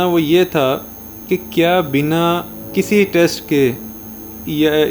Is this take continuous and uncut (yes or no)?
yes